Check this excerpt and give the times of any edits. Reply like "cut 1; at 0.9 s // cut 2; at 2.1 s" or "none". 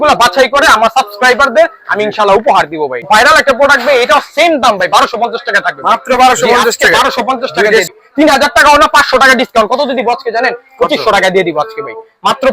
cut 1; at 3.0 s // cut 2; at 7.9 s